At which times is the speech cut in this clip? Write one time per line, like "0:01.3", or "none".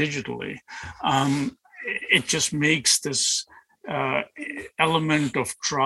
none